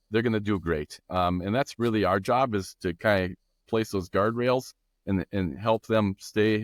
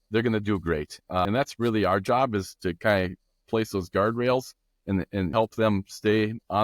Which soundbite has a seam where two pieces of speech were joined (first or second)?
second